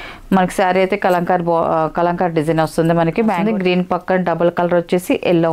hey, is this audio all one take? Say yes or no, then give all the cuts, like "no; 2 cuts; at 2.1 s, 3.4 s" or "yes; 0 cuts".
no; 1 cut; at 3.4 s